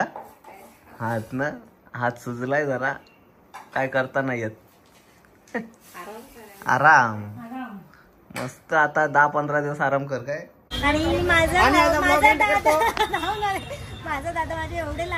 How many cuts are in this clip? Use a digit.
1